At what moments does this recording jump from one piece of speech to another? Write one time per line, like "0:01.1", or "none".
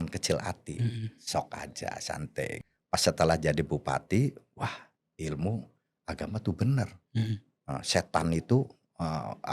0:02.5